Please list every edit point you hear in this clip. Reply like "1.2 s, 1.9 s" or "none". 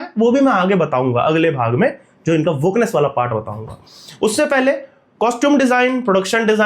none